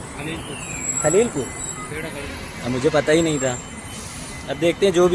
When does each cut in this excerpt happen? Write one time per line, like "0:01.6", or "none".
none